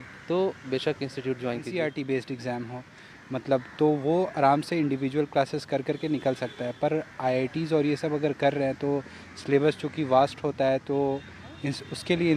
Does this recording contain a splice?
yes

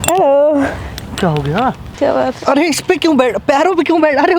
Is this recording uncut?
no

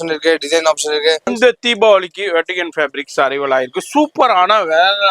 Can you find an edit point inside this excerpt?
yes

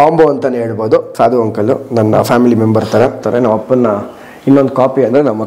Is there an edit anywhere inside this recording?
yes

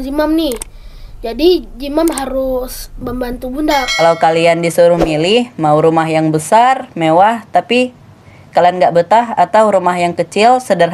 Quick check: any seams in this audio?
yes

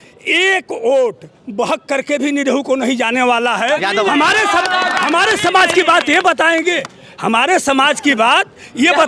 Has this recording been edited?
no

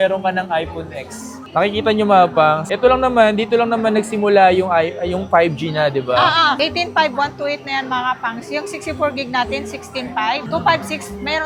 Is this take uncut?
yes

